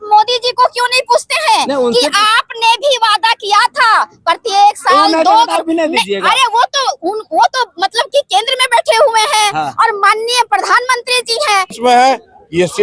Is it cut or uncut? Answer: cut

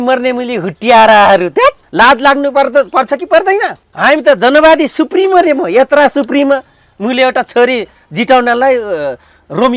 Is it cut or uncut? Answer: cut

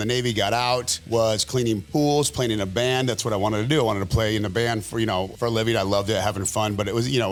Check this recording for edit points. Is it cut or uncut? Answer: uncut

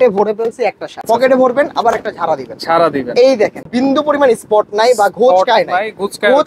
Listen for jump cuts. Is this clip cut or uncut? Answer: cut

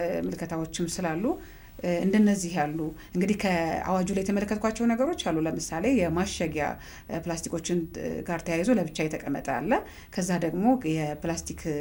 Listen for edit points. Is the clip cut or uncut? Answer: uncut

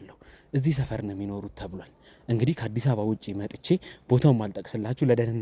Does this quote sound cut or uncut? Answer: uncut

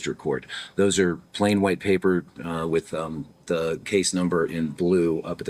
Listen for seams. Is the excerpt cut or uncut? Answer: uncut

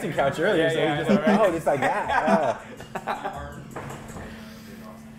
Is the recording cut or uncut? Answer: uncut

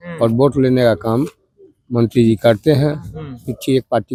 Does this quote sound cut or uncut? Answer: uncut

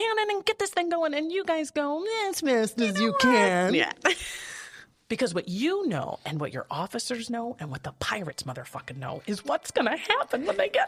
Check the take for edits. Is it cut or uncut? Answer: uncut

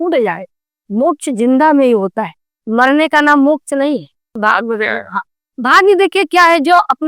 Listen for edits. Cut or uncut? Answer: cut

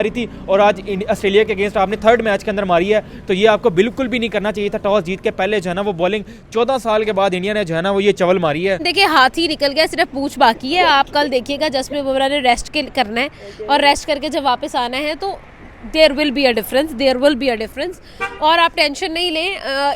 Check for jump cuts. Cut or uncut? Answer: cut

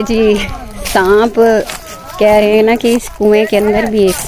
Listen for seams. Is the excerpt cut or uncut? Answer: uncut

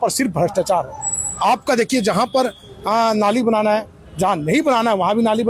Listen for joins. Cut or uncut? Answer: uncut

